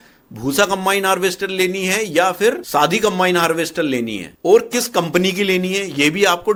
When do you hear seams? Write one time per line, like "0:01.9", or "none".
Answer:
none